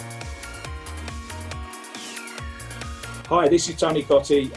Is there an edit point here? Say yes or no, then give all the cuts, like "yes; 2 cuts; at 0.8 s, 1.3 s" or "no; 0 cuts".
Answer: no; 0 cuts